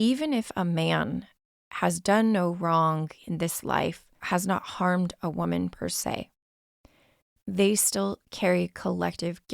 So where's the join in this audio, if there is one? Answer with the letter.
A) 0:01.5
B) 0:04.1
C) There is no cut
B